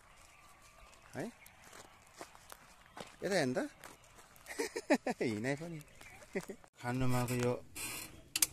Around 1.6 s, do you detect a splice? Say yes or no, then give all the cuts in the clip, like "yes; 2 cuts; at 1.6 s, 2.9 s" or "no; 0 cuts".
no; 1 cut; at 6.7 s